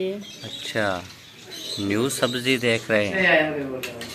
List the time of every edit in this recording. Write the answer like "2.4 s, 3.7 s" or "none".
3.2 s